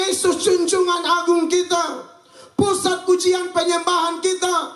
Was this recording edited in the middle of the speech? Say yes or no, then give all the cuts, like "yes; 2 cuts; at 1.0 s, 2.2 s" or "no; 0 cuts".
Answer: no; 0 cuts